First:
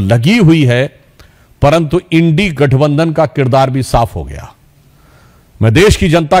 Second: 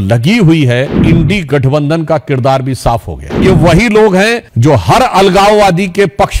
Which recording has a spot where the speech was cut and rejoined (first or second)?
second